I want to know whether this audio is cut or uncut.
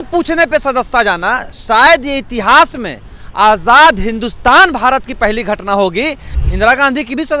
cut